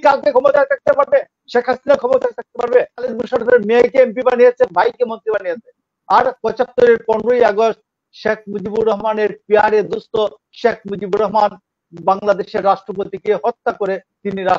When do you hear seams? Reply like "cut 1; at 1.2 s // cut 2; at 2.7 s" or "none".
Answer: cut 1; at 3.2 s